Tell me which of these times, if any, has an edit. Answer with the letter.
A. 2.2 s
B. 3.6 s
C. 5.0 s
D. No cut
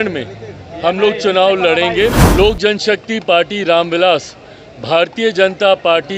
A